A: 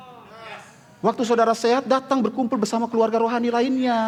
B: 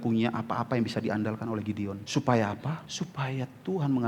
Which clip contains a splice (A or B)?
B